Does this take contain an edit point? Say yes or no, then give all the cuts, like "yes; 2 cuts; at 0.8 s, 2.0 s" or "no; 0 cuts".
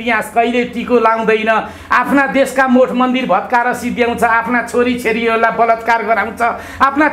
no; 0 cuts